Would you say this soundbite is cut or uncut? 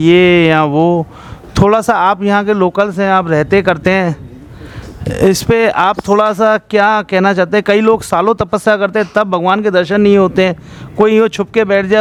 uncut